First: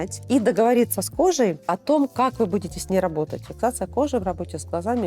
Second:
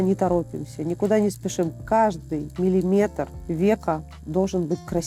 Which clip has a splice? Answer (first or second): first